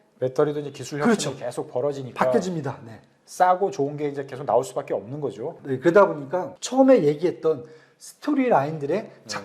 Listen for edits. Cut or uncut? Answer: cut